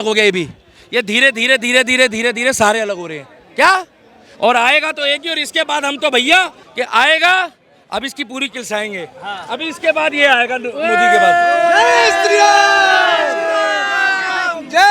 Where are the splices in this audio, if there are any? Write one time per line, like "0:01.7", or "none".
0:06.6